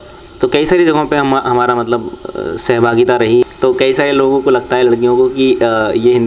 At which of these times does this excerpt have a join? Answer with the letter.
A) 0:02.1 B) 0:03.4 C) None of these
B